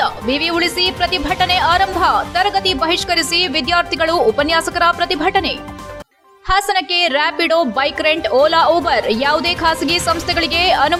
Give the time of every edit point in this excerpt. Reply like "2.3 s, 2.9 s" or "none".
none